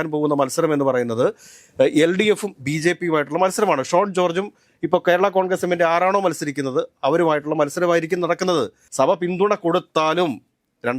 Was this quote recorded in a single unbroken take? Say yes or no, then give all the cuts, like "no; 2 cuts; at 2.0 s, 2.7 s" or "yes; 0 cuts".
no; 1 cut; at 8.8 s